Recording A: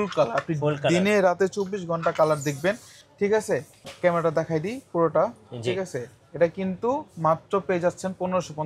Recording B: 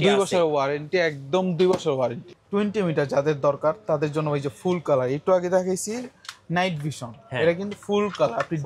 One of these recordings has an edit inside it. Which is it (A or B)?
B